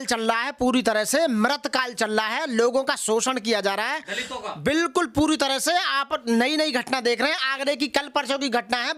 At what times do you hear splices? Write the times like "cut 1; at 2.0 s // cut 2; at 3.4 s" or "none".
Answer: none